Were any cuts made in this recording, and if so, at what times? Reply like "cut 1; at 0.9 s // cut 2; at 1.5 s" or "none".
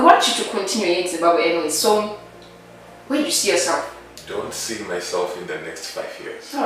cut 1; at 4.2 s